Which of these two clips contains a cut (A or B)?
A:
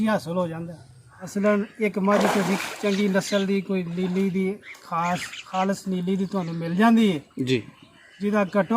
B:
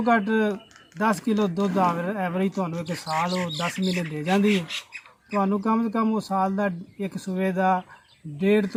A